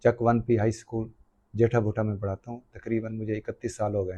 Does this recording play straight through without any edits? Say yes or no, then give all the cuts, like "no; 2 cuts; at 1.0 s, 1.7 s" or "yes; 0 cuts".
yes; 0 cuts